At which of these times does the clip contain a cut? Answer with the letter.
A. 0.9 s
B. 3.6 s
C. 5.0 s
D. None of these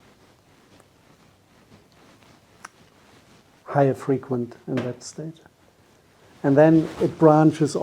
B